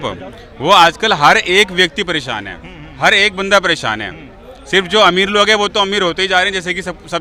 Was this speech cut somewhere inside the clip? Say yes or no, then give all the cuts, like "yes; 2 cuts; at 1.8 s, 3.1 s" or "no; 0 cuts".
no; 0 cuts